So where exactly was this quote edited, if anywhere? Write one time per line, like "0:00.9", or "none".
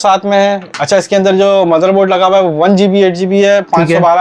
none